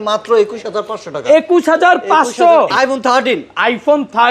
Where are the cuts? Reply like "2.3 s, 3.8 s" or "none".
2.7 s